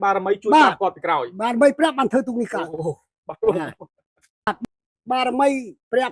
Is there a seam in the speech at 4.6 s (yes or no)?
yes